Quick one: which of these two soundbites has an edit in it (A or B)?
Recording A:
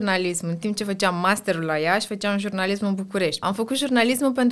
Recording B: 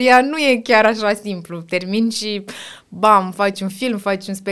A